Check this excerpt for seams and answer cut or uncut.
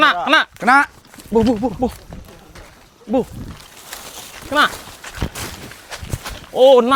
uncut